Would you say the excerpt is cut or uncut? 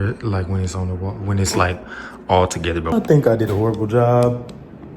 cut